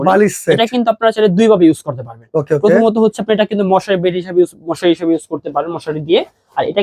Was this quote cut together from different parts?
no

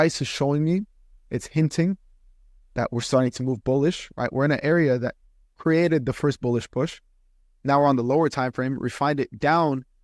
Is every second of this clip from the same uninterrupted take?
yes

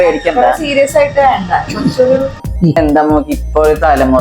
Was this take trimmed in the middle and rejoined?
yes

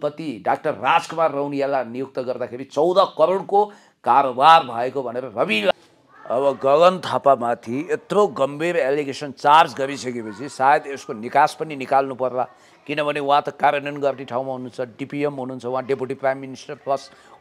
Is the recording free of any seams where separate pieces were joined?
no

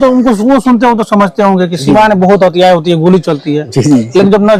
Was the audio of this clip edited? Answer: no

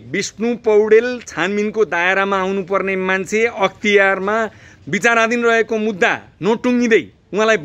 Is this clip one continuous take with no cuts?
yes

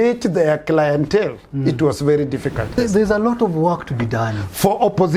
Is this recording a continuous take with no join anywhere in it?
no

